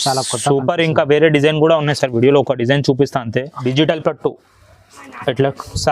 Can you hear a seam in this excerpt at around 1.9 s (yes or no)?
no